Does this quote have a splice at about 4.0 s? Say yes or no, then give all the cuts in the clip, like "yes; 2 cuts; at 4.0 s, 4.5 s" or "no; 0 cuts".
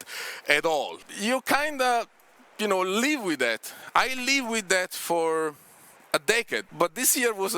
no; 2 cuts; at 1.0 s, 6.7 s